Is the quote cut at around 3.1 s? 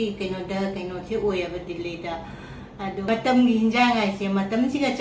yes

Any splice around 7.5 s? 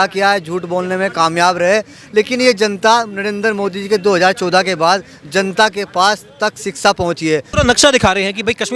yes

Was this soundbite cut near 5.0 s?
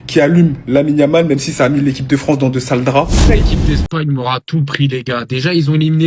no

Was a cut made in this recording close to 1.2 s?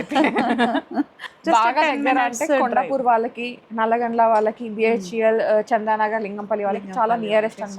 yes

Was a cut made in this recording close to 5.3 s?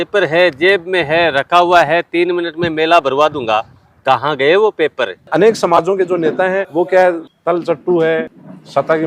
yes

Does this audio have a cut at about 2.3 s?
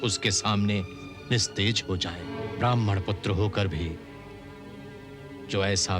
yes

